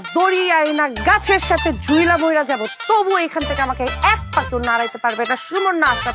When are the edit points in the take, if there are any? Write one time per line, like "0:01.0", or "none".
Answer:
none